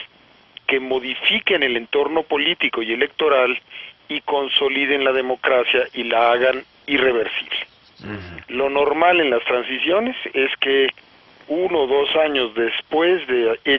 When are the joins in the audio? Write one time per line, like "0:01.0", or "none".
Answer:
0:01.1